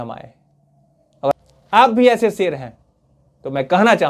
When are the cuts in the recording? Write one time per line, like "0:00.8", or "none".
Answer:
0:01.3